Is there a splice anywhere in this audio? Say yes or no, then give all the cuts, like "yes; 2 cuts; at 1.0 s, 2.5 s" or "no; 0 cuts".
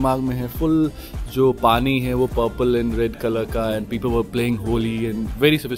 no; 0 cuts